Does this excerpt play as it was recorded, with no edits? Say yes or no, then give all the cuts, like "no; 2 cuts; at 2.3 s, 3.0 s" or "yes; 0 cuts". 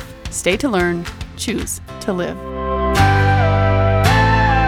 yes; 0 cuts